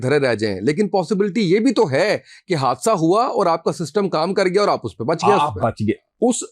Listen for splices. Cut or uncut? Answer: uncut